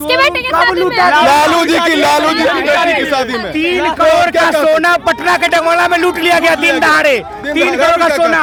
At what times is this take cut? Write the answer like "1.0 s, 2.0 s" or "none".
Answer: none